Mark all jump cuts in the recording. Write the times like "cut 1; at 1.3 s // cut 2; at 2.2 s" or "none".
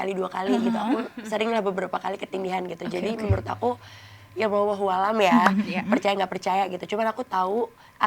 none